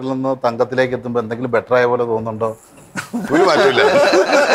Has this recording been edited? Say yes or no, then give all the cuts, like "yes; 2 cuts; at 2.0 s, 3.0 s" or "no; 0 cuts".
no; 0 cuts